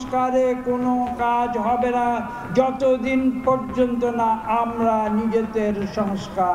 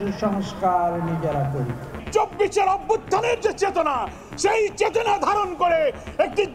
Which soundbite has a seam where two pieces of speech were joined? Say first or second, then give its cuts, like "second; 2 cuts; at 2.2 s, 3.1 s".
second; 1 cut; at 1.9 s